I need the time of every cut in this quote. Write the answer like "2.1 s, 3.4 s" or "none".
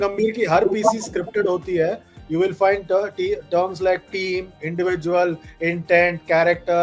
none